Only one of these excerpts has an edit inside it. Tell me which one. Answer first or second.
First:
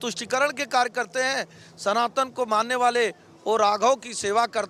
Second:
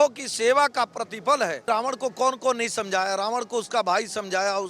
second